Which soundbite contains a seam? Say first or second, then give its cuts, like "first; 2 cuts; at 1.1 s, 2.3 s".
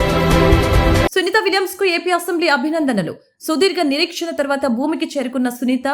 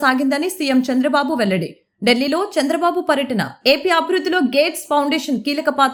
first; 1 cut; at 1.1 s